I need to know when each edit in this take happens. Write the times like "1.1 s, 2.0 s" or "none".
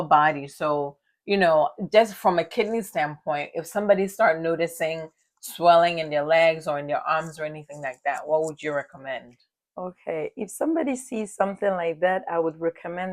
none